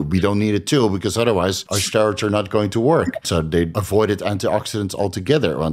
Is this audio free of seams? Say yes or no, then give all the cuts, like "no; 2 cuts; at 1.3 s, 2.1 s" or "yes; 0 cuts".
no; 2 cuts; at 1.7 s, 3.7 s